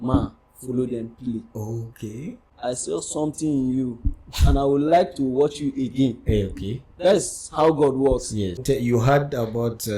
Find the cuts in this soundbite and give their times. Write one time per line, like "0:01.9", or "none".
0:02.4
0:08.6